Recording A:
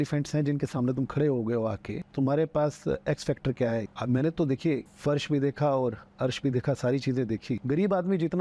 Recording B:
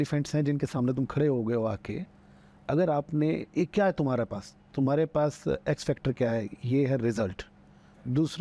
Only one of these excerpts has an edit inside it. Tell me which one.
A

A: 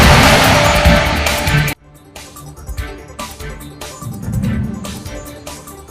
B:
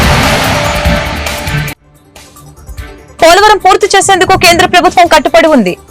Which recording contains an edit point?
B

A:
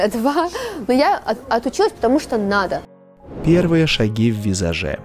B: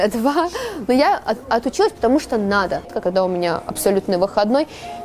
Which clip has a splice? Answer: B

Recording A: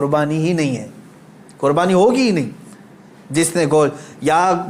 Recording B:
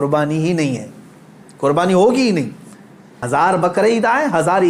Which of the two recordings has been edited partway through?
B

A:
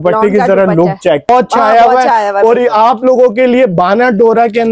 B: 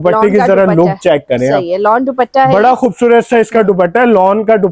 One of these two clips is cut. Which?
A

